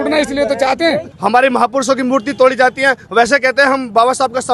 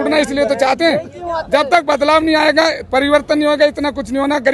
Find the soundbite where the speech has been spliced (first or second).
first